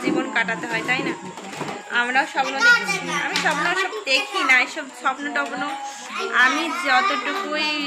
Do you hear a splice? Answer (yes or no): no